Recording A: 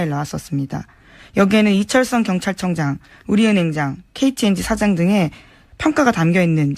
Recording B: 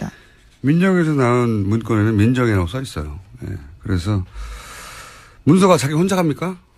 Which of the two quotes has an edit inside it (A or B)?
A